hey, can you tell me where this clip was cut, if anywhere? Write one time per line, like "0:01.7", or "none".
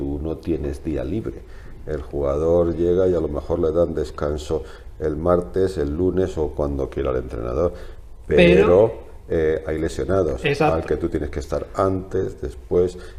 none